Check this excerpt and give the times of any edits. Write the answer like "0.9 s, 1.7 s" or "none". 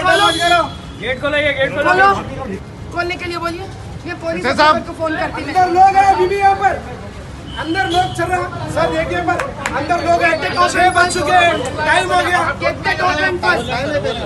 2.6 s

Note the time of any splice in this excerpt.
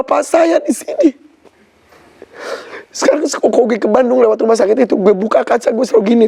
none

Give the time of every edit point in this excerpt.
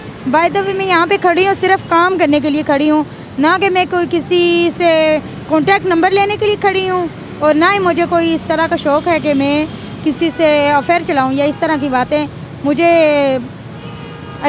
none

